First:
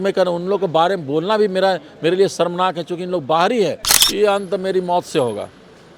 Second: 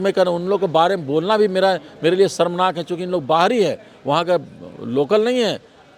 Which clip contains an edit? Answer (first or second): first